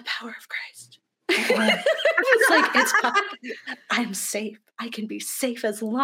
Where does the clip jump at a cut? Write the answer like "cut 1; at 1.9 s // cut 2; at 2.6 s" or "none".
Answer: none